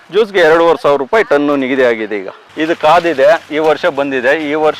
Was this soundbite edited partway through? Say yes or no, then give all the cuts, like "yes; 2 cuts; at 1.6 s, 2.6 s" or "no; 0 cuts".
yes; 1 cut; at 2.5 s